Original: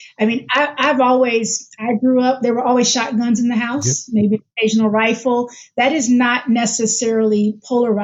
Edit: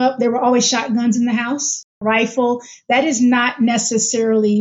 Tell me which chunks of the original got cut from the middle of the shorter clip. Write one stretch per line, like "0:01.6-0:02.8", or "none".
0:04.2-0:04.8